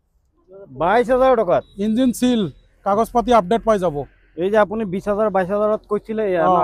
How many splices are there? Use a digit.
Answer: 0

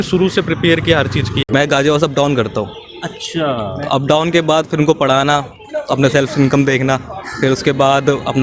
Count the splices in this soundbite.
1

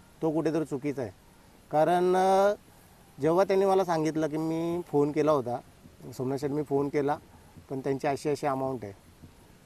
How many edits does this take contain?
0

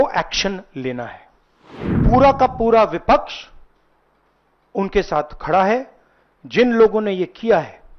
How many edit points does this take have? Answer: 1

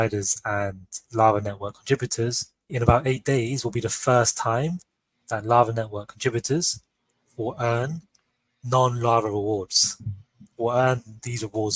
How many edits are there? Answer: 1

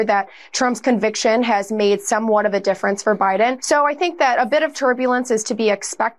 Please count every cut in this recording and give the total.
1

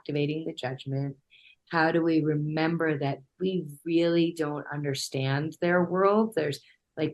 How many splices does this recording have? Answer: 0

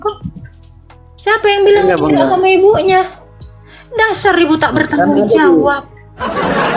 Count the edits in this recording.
0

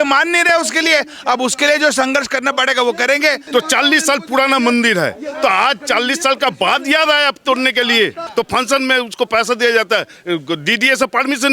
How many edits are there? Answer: 2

